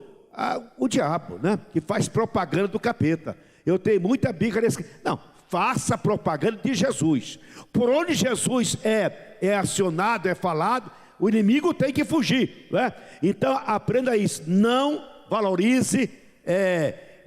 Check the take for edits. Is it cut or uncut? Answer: uncut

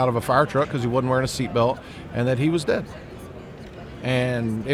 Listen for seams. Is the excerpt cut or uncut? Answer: uncut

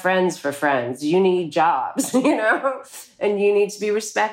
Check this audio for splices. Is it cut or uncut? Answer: uncut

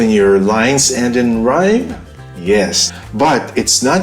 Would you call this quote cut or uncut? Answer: cut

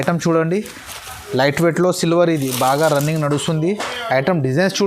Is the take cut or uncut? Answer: cut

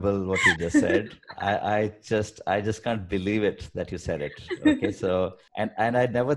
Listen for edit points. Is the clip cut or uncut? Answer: cut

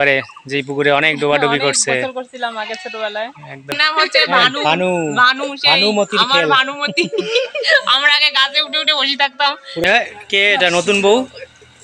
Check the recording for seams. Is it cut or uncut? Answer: cut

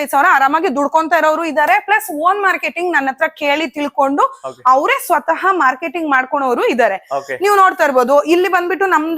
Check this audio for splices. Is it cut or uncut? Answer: uncut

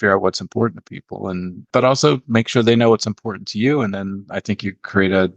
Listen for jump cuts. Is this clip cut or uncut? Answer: cut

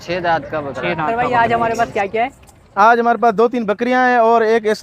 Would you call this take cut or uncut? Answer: cut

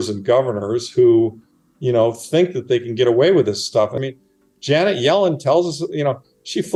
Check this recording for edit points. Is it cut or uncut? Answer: uncut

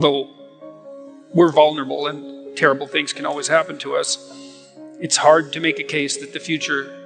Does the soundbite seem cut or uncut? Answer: uncut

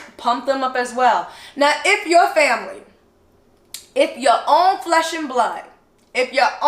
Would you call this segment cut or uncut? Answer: uncut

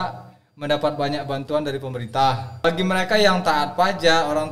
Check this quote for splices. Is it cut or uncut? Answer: cut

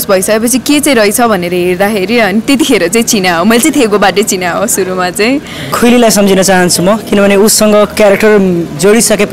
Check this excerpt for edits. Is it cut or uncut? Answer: cut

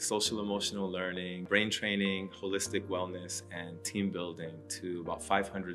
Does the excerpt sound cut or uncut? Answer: cut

